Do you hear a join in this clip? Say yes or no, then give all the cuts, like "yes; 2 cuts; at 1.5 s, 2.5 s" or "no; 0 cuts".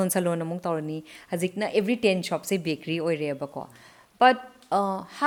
no; 0 cuts